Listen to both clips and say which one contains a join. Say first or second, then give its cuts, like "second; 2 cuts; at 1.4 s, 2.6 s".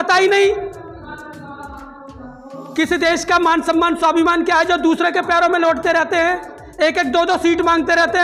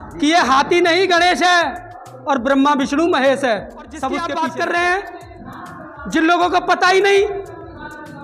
second; 1 cut; at 4.2 s